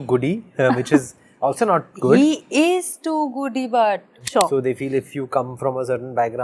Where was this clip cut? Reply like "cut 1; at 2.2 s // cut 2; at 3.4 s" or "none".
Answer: cut 1; at 4.1 s

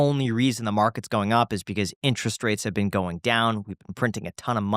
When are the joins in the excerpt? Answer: none

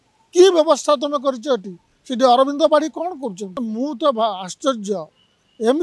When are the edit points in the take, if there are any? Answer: cut 1; at 3.5 s

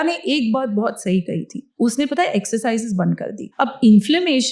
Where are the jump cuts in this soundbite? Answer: cut 1; at 1.6 s // cut 2; at 3.5 s

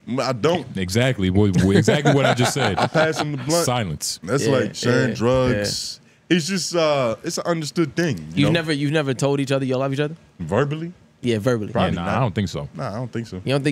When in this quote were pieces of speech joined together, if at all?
none

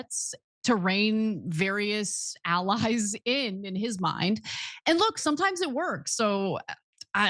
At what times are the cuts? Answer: cut 1; at 4.5 s

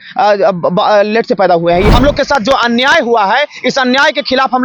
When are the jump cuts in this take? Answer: cut 1; at 1.9 s

